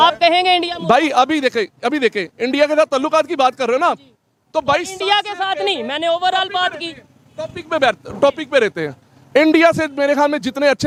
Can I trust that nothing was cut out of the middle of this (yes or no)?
yes